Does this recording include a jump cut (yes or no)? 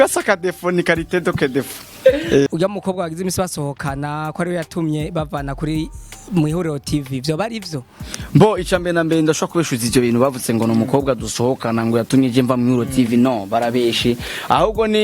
yes